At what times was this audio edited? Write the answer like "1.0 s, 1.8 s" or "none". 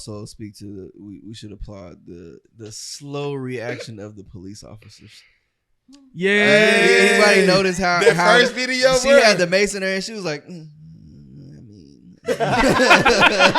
2.5 s